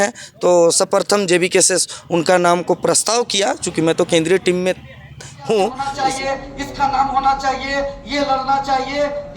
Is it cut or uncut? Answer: cut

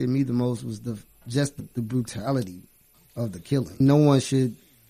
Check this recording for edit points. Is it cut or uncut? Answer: uncut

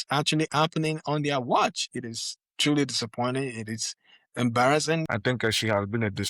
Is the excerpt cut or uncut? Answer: cut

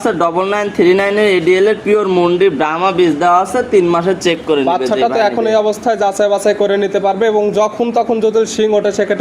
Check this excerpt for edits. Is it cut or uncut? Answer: uncut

